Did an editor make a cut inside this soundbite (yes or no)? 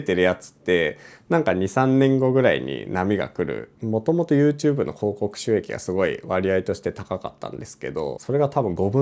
yes